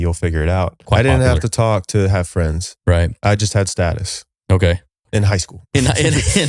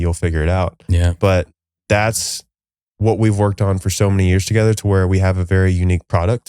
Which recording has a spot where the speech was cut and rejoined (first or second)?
first